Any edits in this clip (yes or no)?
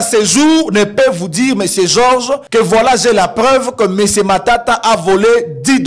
yes